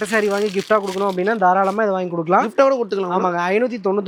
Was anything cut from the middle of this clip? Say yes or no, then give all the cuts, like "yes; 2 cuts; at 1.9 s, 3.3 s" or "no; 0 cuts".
no; 0 cuts